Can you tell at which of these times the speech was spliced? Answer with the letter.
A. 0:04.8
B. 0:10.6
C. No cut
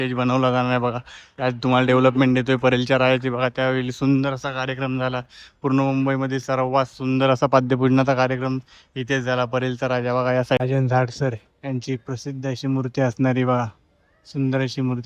B